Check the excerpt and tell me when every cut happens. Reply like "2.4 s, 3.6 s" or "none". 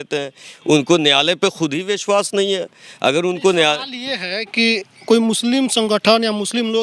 none